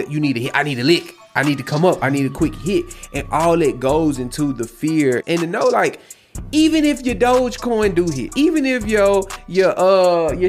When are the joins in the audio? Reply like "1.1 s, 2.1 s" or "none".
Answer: 5.2 s